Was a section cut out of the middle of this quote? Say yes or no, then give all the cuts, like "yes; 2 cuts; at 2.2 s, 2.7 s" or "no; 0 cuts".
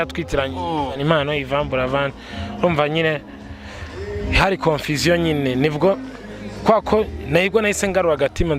no; 0 cuts